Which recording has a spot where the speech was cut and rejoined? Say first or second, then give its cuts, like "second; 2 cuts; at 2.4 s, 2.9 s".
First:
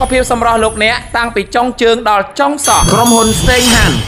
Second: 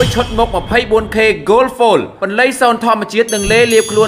first; 1 cut; at 2.9 s